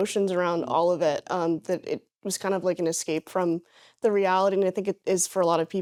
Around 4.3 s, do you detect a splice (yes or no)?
no